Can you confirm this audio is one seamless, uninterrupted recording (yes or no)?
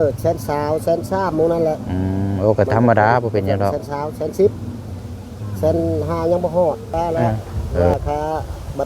no